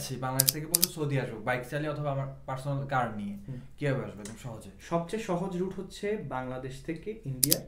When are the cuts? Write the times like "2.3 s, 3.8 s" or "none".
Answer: none